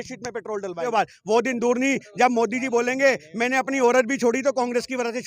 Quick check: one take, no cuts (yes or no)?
no